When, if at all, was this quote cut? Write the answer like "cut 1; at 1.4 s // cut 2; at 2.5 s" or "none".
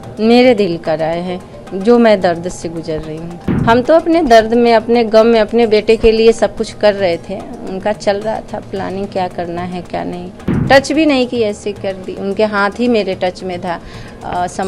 cut 1; at 3.5 s // cut 2; at 10.5 s